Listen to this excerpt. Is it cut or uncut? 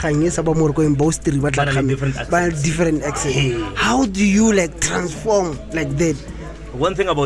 uncut